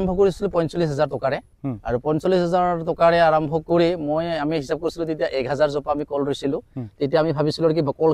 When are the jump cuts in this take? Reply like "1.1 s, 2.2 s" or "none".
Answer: none